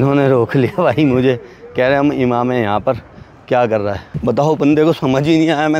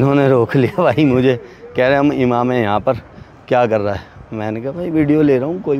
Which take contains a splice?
first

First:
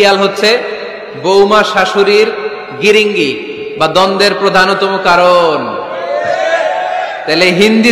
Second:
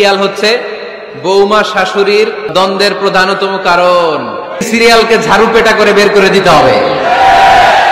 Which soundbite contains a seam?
second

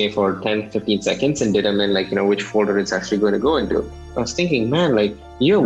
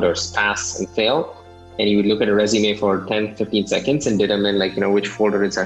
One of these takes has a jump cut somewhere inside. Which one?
first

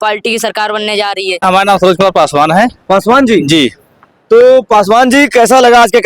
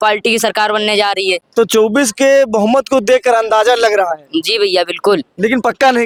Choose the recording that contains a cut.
first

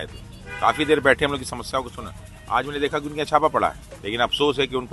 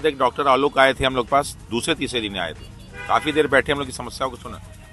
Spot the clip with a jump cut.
first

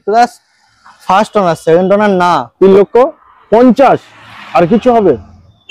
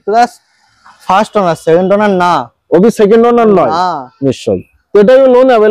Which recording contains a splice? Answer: first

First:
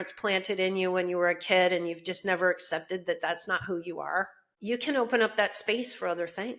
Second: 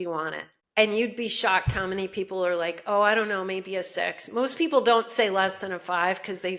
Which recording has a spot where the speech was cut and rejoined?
first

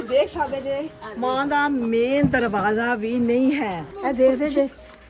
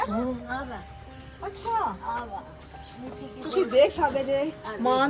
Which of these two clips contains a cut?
first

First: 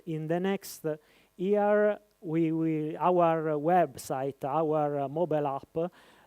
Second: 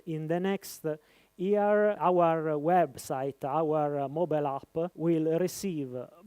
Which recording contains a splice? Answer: second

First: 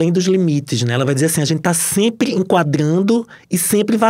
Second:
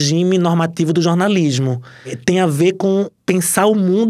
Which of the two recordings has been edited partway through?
second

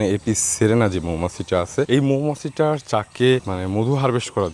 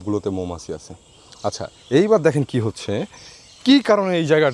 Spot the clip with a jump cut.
first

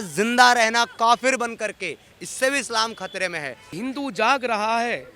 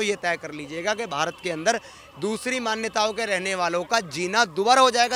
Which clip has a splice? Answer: first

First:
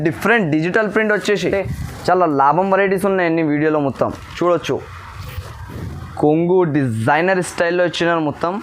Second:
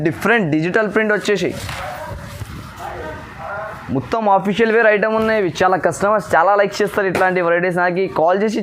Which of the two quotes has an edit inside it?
first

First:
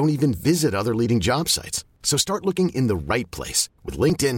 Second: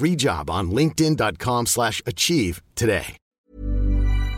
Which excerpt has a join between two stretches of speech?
second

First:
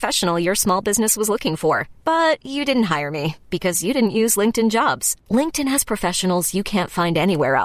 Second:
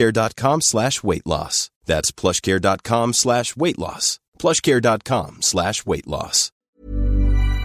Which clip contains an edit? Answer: second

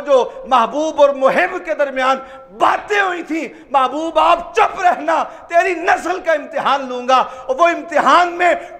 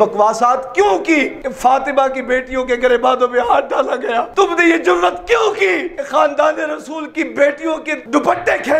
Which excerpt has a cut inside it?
second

